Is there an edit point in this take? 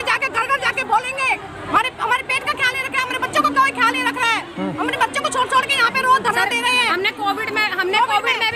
yes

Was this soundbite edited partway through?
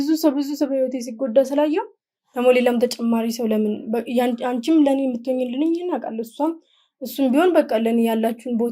no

